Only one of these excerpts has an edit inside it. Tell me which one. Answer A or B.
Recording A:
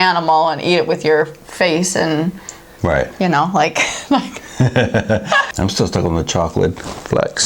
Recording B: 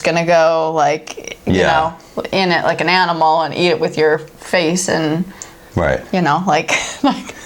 A